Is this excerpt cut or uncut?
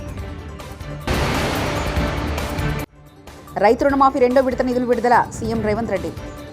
cut